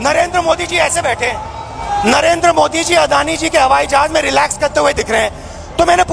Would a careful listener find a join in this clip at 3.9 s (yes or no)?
no